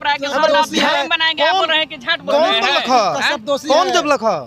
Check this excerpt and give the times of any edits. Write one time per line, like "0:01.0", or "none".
0:00.9